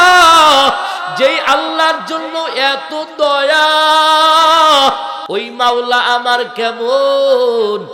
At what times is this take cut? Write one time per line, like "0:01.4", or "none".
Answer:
none